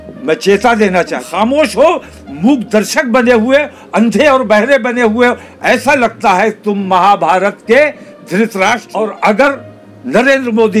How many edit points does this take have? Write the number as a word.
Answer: two